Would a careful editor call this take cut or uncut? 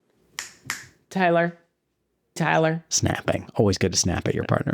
cut